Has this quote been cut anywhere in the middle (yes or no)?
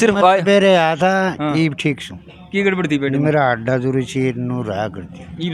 no